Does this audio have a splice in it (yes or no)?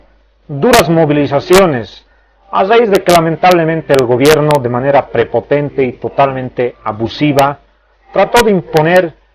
yes